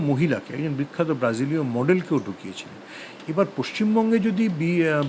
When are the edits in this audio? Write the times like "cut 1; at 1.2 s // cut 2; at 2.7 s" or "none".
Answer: none